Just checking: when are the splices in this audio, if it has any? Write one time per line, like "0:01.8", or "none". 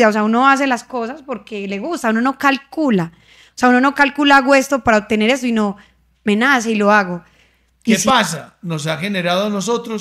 0:08.0